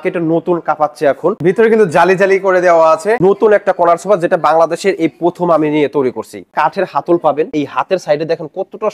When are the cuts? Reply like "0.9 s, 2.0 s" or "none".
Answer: 1.4 s, 3.2 s, 6.5 s, 7.5 s